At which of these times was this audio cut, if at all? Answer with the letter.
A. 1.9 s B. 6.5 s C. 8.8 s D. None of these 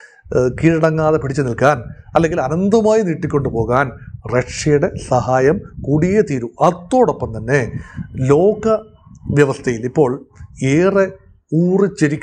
D